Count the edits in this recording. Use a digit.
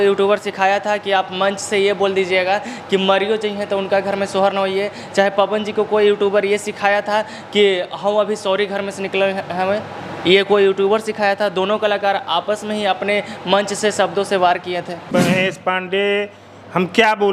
1